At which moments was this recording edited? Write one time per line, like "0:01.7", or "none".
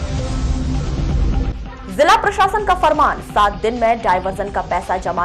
0:01.3